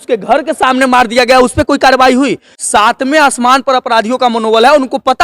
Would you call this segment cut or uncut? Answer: cut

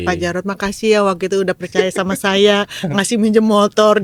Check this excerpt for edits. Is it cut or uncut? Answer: uncut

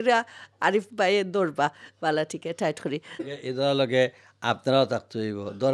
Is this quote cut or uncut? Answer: cut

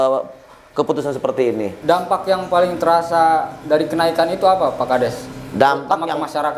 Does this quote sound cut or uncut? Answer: cut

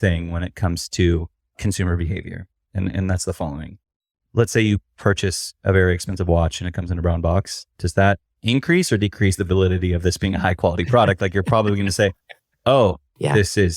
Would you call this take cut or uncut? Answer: cut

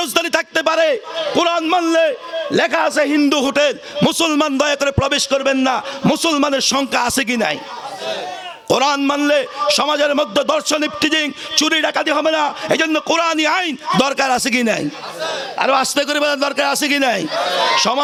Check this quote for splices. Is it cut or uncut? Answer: uncut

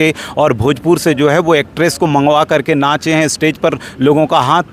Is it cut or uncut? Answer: uncut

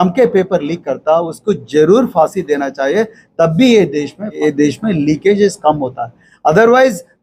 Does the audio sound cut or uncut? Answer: cut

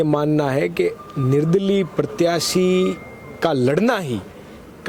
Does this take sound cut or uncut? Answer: uncut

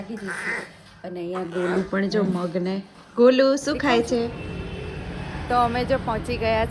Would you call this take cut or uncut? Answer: cut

